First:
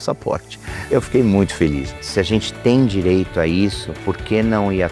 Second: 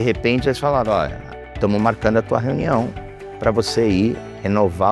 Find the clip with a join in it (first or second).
first